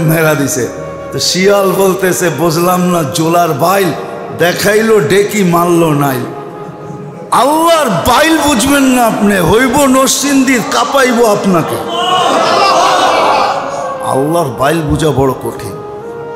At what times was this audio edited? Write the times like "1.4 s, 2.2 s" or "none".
15.4 s